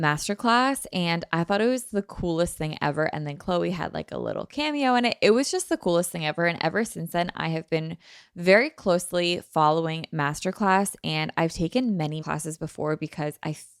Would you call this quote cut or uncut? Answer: uncut